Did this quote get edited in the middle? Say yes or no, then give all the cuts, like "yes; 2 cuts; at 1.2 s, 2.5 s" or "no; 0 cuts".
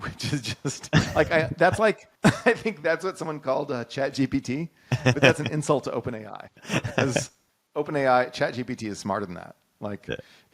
yes; 1 cut; at 2.1 s